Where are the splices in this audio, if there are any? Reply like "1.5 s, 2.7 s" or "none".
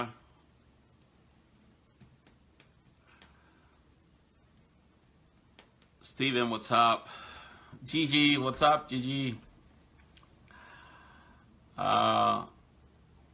none